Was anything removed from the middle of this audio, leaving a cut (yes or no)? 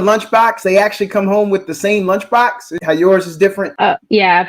yes